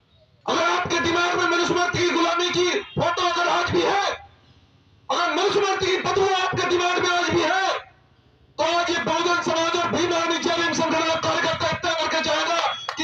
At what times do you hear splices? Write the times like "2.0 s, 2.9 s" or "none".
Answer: none